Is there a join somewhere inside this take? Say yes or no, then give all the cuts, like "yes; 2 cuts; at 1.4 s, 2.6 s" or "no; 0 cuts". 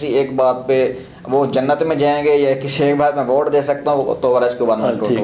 no; 0 cuts